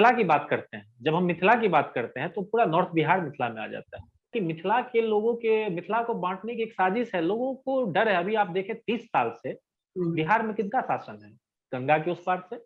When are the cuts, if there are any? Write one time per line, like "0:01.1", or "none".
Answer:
0:04.3